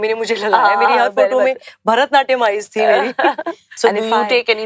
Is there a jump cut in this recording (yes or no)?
yes